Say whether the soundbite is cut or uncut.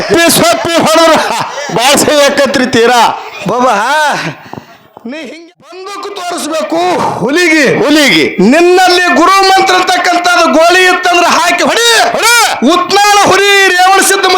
cut